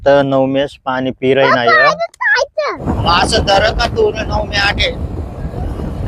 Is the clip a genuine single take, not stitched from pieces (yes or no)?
no